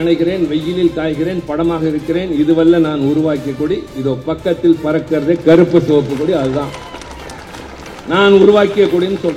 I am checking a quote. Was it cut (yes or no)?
no